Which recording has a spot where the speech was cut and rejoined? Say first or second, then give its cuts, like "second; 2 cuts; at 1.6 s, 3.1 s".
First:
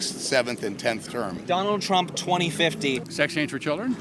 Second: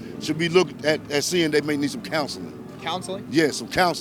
first; 2 cuts; at 1.4 s, 3.1 s